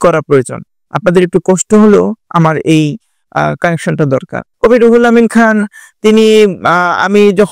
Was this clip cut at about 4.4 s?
yes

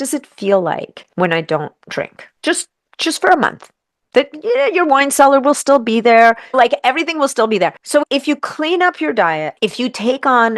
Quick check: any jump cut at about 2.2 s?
yes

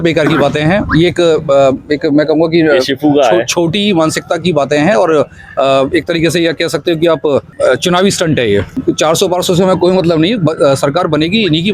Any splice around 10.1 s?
no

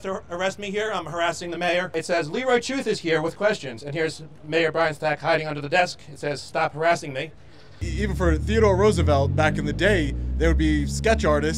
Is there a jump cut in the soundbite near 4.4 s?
no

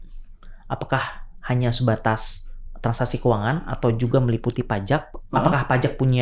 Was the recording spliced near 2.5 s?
no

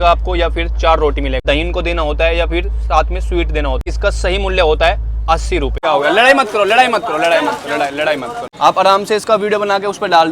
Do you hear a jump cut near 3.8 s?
yes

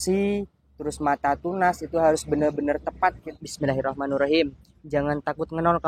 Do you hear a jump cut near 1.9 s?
no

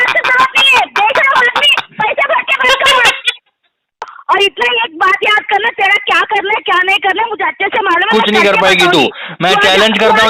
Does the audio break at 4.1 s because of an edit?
yes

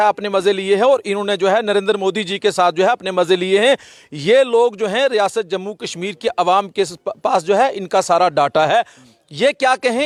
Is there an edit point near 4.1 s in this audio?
no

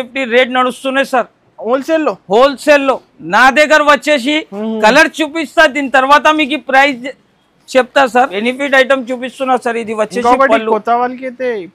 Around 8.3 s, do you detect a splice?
yes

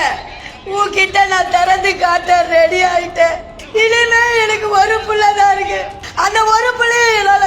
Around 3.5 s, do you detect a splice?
yes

